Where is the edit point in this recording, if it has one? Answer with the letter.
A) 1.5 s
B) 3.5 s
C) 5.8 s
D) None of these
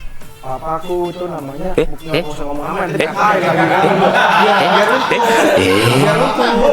D